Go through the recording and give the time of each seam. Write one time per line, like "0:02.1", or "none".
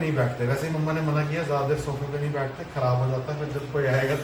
none